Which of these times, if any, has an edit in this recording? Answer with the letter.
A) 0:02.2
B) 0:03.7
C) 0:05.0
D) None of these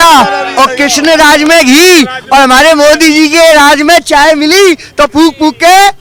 D